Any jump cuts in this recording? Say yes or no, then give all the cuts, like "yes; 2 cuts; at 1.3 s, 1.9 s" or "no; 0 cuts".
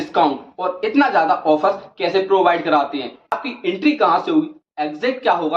yes; 1 cut; at 3.3 s